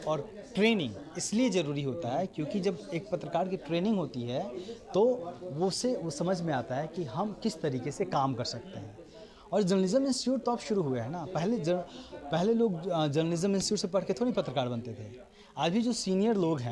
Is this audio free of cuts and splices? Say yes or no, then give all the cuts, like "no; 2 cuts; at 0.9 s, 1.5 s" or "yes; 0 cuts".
yes; 0 cuts